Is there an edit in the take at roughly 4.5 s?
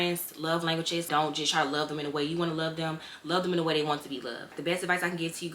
yes; 2 cuts; at 1.1 s, 4.5 s

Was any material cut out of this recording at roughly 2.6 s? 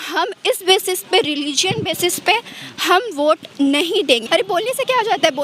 no; 1 cut; at 4.2 s

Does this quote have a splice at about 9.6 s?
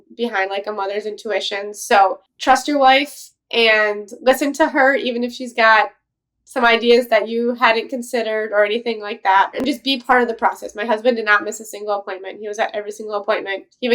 yes; 2 cuts; at 2.3 s, 9.6 s

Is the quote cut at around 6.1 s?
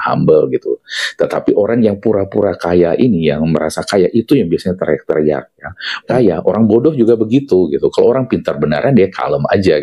yes; 1 cut; at 6.1 s

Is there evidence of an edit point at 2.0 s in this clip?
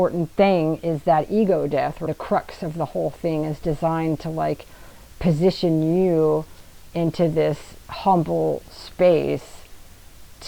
yes; 1 cut; at 2.0 s

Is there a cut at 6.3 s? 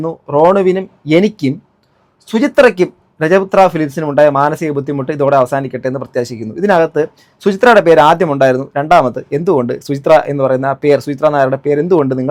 no; 0 cuts

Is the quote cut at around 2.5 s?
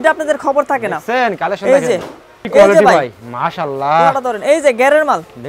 yes; 1 cut; at 2.5 s

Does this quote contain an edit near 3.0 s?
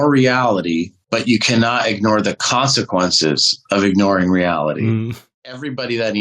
no; 2 cuts; at 1.0 s, 5.0 s

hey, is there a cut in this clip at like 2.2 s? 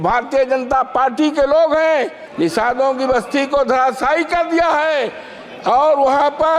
yes; 1 cut; at 2.2 s

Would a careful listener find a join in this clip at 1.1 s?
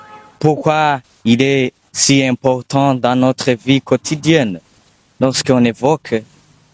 yes; 2 cuts; at 1.1 s, 5.5 s

